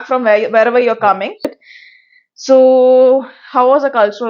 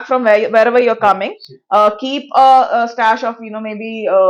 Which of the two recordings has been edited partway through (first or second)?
first